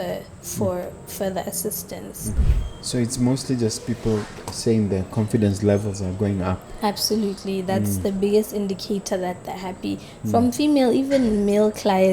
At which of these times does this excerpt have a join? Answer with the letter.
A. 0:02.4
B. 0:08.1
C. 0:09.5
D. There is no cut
A